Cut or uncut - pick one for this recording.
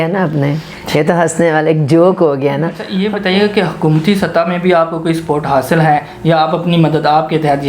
cut